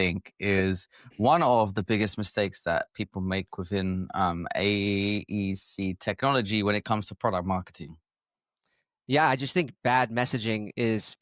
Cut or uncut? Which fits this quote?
uncut